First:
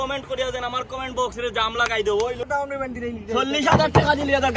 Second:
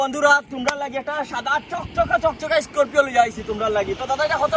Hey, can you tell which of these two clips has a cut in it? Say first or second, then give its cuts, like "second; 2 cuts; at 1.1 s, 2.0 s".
first; 1 cut; at 2.4 s